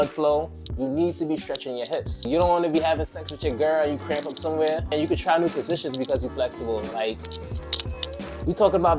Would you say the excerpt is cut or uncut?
cut